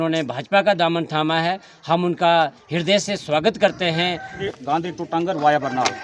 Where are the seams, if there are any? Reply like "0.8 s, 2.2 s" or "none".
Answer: 4.4 s

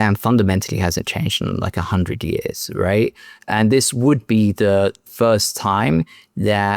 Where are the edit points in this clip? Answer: 5.0 s

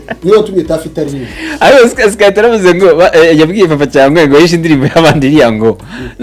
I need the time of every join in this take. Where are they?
none

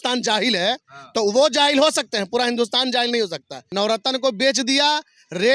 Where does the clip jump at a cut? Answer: 3.6 s

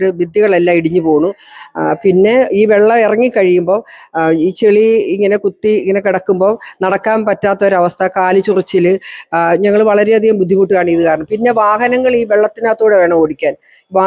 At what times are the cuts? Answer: none

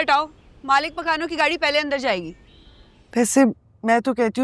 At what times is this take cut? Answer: 3.1 s

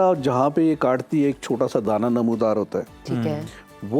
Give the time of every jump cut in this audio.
none

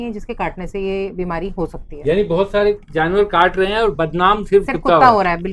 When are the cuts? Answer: none

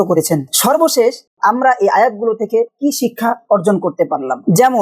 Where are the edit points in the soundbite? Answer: 1.3 s

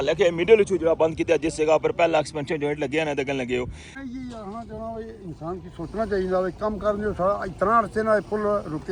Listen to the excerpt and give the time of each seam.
3.9 s

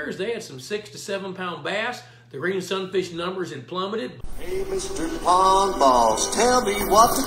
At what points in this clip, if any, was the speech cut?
4.2 s

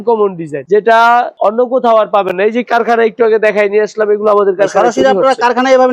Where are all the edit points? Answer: none

